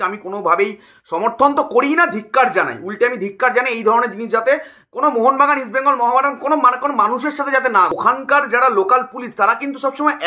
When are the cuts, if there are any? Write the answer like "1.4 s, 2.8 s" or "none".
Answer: 7.9 s